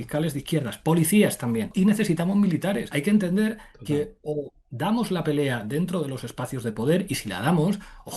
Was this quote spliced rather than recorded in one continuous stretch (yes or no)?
yes